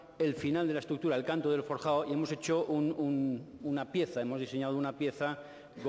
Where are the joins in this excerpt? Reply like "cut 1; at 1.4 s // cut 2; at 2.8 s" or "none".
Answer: cut 1; at 4.7 s